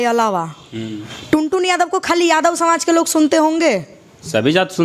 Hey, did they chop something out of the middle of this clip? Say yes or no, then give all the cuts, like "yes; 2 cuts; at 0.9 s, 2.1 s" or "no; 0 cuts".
no; 0 cuts